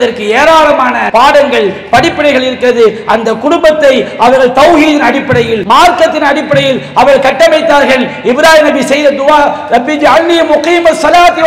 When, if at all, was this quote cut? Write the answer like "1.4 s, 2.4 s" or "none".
1.0 s, 5.6 s